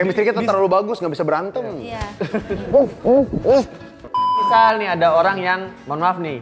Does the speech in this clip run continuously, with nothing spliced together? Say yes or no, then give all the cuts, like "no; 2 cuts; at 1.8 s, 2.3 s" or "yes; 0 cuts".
no; 1 cut; at 4.4 s